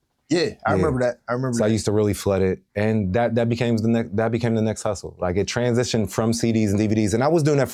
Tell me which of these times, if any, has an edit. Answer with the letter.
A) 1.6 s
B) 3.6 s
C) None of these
C